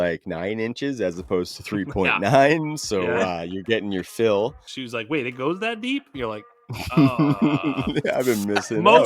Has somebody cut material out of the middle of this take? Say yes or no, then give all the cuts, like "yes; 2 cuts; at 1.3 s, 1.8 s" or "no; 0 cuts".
yes; 1 cut; at 4.7 s